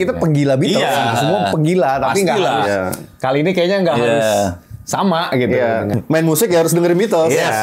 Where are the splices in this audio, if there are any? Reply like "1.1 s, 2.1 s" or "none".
5.9 s